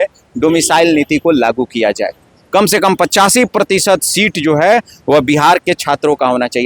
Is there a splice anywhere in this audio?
no; 0 cuts

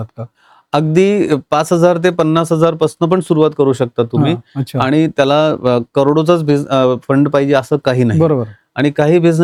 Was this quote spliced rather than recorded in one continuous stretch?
no; 0 cuts

